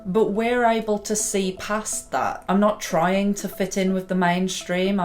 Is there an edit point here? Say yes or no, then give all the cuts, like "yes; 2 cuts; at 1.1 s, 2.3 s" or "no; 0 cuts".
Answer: yes; 1 cut; at 2.4 s